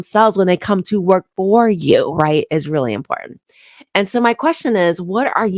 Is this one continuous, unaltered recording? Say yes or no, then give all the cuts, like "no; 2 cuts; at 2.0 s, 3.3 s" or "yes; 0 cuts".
yes; 0 cuts